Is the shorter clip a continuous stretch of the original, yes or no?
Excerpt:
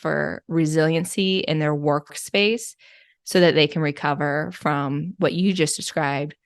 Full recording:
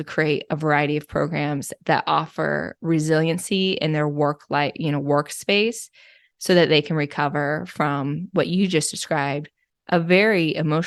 no